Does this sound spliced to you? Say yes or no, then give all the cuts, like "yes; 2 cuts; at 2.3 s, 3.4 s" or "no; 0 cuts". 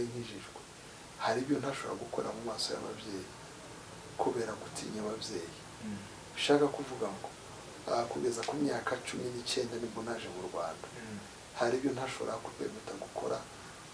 no; 0 cuts